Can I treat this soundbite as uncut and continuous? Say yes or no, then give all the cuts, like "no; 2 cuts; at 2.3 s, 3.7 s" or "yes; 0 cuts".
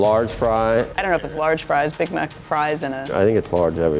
no; 2 cuts; at 1.0 s, 3.0 s